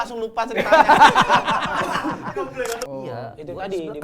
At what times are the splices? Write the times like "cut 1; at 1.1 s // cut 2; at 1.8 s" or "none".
cut 1; at 2.8 s